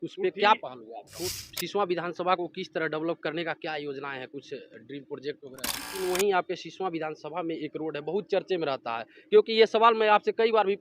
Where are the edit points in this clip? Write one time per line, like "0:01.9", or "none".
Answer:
0:01.3
0:06.0